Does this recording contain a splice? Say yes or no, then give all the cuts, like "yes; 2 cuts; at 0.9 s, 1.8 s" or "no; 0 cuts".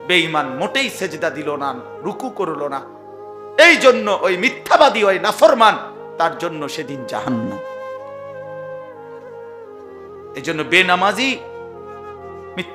no; 0 cuts